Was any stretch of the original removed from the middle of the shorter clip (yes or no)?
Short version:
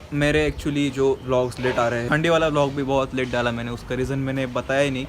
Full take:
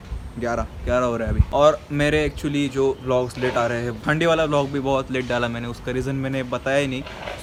yes